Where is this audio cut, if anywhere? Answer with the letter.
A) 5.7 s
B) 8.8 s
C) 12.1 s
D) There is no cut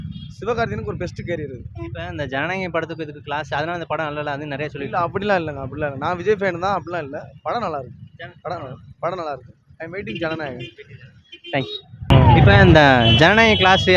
C